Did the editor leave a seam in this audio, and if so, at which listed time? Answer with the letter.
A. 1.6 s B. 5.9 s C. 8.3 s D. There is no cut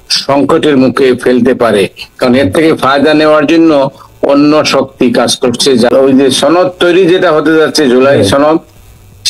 B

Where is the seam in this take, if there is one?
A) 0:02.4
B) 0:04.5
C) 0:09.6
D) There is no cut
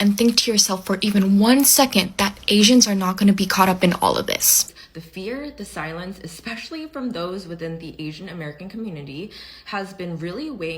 B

